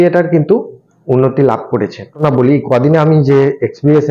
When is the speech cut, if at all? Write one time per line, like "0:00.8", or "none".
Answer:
0:02.2